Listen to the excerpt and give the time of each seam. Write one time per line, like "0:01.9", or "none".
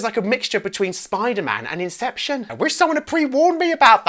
0:02.5

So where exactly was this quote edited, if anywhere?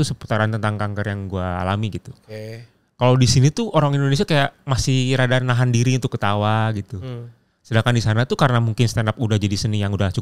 none

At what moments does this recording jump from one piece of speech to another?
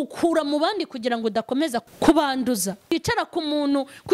0:01.8
0:02.9

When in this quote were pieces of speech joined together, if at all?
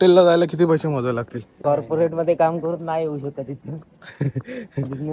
0:01.5

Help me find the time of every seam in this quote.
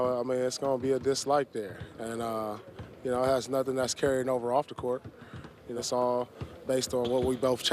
0:05.8

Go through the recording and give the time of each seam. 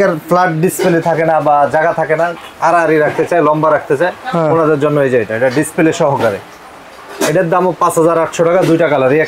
none

